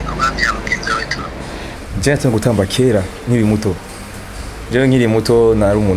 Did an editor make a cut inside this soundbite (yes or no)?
yes